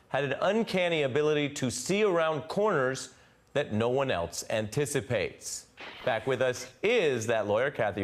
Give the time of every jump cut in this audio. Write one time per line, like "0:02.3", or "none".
0:05.9